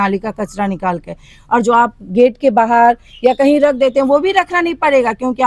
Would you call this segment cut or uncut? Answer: uncut